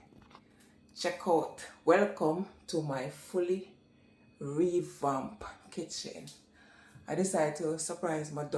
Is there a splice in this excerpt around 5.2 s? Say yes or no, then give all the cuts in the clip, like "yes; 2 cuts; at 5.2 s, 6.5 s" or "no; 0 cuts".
no; 0 cuts